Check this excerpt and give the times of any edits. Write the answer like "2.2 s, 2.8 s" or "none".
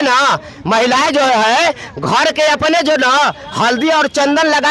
none

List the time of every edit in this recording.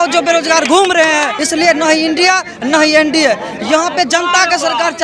1.4 s

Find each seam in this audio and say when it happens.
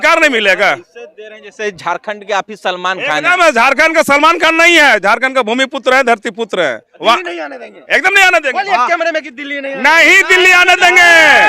6.9 s

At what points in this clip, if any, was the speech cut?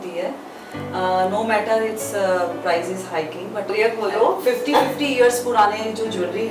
3.7 s

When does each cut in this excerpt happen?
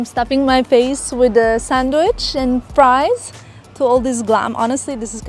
none

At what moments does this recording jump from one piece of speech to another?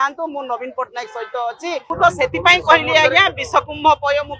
1.8 s

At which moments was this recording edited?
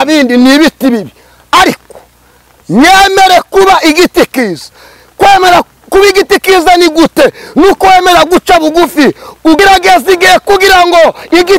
9.6 s

